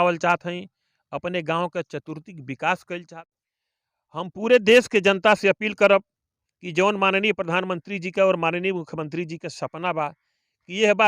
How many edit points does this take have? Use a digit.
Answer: 1